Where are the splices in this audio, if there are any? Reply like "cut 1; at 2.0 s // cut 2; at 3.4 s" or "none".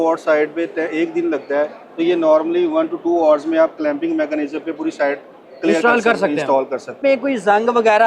cut 1; at 6.9 s